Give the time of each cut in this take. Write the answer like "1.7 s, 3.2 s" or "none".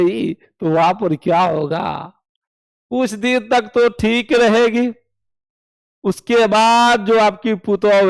none